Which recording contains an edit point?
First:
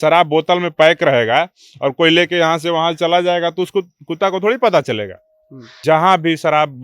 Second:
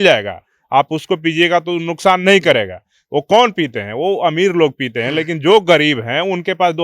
first; 1 cut; at 5.7 s

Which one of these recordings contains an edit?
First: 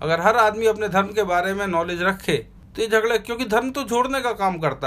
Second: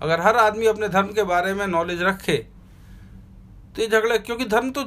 first; 1 cut; at 2.6 s

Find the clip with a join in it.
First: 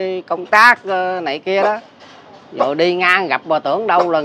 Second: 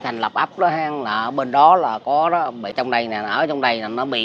second; 1 cut; at 2.7 s

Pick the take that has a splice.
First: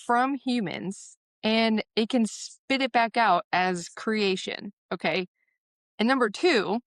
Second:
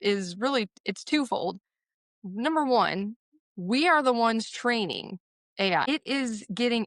second; 1 cut; at 5.9 s

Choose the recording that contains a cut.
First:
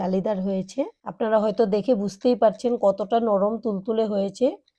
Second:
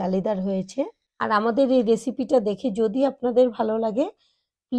first; 1 cut; at 1.0 s

